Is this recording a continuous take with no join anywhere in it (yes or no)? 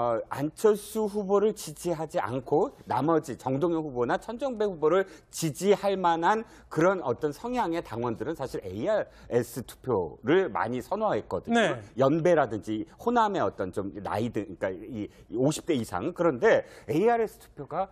yes